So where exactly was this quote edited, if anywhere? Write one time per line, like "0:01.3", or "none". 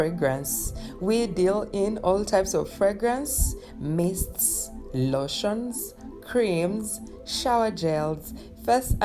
none